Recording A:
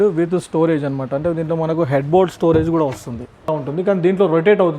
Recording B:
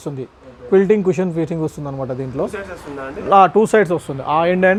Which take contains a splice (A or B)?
A